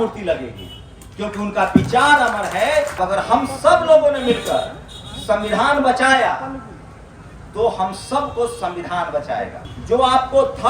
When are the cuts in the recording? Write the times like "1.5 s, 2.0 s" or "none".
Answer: 3.0 s, 9.7 s